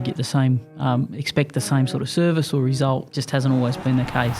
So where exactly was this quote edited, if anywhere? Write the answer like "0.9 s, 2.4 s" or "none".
3.1 s